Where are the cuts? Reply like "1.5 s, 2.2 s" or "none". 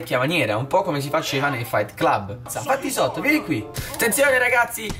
2.4 s, 3.8 s